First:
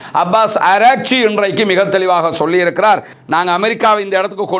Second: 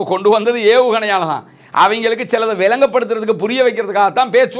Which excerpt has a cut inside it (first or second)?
first